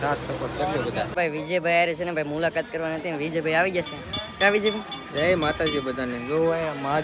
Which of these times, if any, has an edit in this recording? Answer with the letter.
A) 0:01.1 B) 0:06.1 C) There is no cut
A